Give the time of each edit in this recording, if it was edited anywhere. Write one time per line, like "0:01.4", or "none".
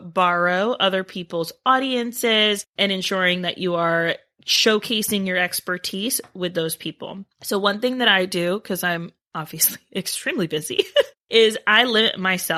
none